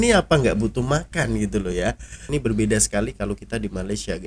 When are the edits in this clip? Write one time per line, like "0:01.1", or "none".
0:02.2